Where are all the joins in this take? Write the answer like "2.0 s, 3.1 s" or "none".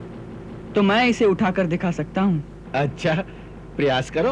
2.6 s

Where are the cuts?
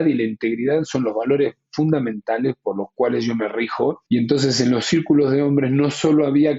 4.0 s

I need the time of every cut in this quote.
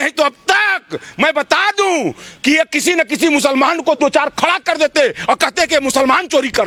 none

